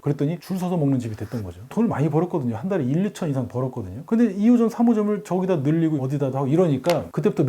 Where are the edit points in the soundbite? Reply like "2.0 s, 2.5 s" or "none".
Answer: 1.6 s, 6.0 s